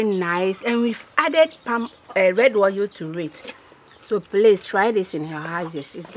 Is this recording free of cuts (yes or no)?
yes